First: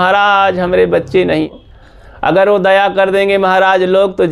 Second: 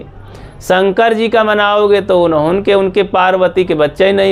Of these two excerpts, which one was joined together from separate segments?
first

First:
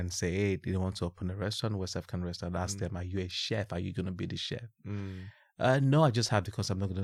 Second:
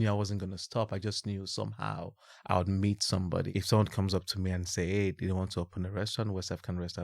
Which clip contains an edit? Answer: second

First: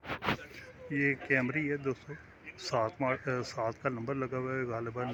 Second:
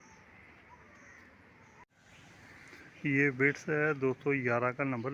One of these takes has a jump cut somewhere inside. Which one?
second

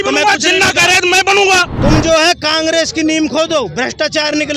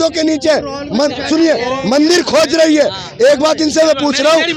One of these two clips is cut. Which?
first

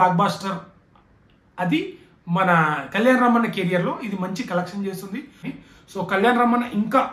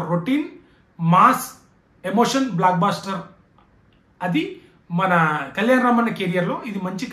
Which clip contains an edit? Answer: first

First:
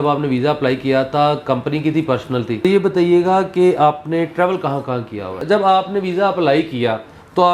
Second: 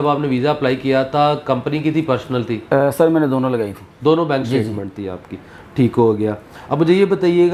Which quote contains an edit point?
first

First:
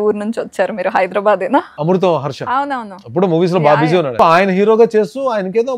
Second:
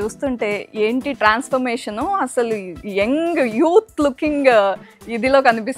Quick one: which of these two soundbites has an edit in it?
first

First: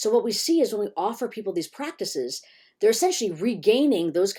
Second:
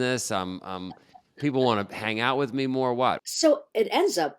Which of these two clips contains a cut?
second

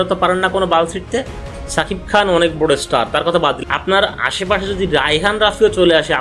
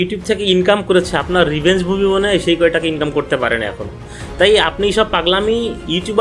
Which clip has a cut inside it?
first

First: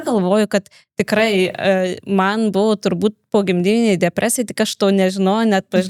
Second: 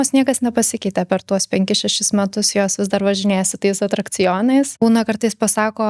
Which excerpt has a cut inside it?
second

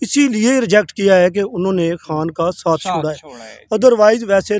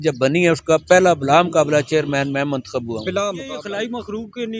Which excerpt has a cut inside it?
second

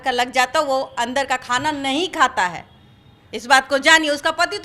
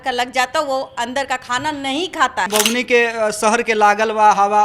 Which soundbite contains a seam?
second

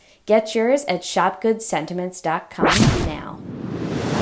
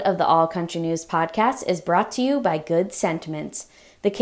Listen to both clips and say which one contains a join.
first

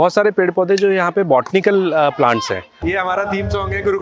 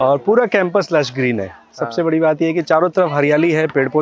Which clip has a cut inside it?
first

